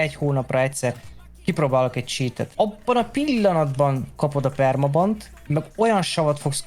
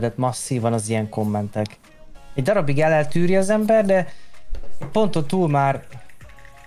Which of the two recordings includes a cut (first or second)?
first